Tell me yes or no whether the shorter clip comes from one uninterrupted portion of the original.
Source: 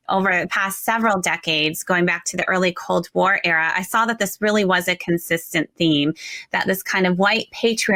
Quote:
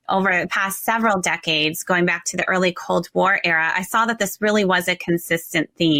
yes